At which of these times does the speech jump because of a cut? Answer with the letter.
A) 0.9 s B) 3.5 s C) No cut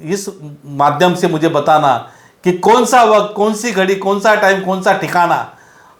C